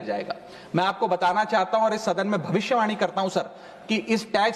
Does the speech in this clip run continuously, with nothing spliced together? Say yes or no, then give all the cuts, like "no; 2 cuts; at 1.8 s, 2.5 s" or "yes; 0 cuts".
yes; 0 cuts